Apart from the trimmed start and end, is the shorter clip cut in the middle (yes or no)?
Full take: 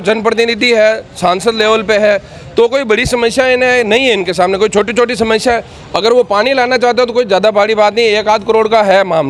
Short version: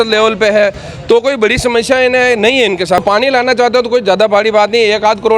yes